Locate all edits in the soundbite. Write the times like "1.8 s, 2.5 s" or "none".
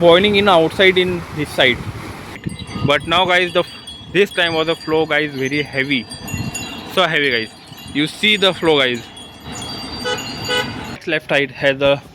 2.4 s, 11.0 s